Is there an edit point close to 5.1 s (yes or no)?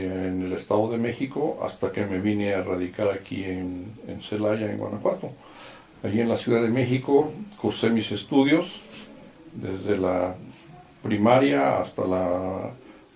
no